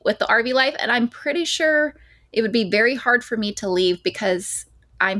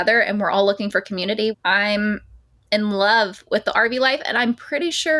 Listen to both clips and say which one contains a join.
second; 1 cut; at 1.5 s

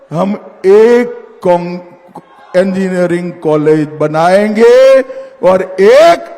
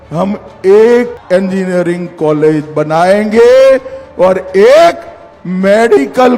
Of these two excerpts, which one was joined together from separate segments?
second; 1 cut; at 1.2 s

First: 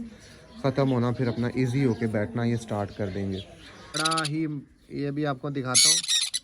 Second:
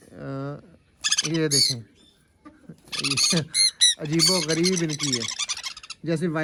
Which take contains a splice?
first; 1 cut; at 3.9 s

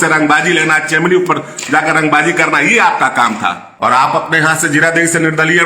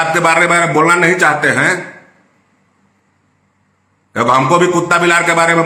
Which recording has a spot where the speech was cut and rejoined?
first; 1 cut; at 3.7 s

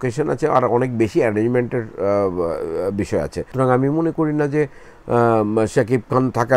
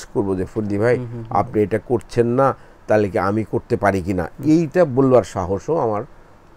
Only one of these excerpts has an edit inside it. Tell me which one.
first; 1 cut; at 3.4 s

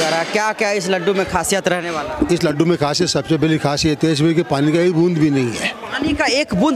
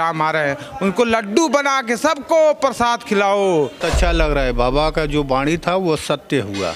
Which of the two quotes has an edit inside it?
second; 1 cut; at 3.8 s

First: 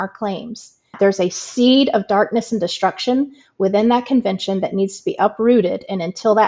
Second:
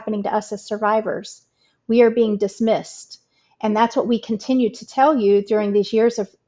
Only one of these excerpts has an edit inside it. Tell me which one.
first; 1 cut; at 1.0 s

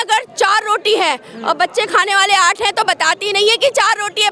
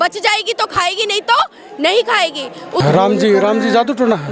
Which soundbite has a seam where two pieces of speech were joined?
second; 1 cut; at 2.8 s

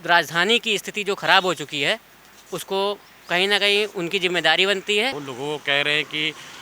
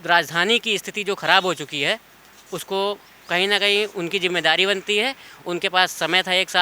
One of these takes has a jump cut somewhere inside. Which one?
first; 1 cut; at 5.2 s

